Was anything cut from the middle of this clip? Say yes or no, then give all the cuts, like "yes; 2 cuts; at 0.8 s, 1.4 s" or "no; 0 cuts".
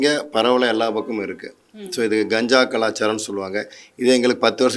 no; 0 cuts